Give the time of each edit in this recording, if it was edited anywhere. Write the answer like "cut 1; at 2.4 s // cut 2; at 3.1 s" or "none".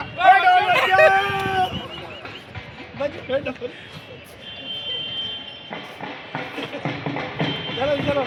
none